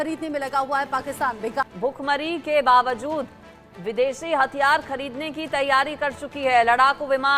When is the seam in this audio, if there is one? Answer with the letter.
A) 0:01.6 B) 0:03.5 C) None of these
A